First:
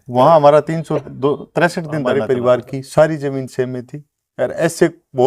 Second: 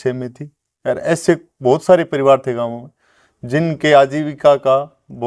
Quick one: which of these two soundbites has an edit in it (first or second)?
first